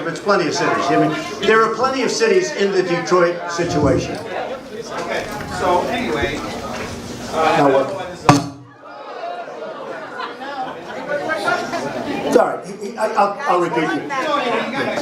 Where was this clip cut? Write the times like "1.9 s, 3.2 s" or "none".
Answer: none